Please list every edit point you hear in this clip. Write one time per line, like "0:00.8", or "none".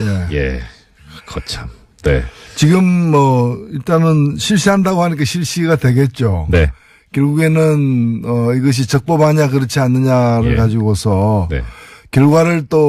0:08.9